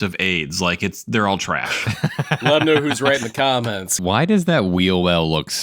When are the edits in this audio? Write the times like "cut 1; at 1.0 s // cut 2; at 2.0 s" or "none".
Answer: cut 1; at 2.5 s // cut 2; at 3.9 s